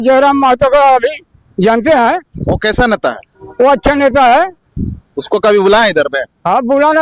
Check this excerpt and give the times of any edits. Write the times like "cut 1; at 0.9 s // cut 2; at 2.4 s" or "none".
none